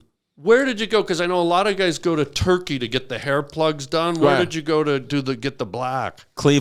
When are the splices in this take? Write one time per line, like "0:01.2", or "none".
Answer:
none